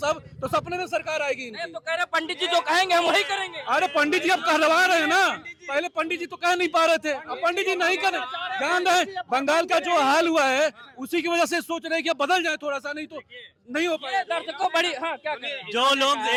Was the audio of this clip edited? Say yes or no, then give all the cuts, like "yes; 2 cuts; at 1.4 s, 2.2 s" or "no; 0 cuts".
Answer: no; 0 cuts